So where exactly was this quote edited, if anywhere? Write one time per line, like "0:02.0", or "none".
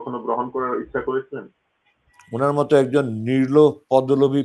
none